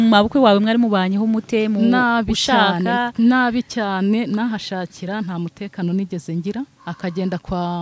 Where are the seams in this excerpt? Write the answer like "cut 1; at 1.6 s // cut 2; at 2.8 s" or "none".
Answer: cut 1; at 6.8 s